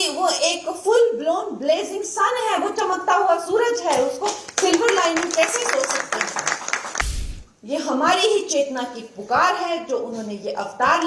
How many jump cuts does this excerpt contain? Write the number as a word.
one